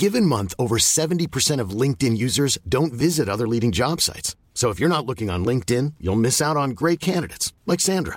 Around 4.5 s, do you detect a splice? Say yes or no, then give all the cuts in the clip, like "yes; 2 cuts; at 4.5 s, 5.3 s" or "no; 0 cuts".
no; 0 cuts